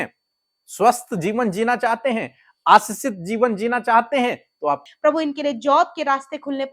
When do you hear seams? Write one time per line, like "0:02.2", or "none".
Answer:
0:04.9